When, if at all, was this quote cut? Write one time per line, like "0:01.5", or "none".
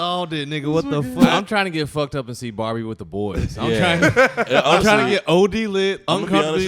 0:01.3